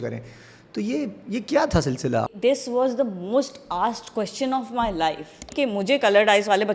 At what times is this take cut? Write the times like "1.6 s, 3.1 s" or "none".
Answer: 2.2 s, 5.5 s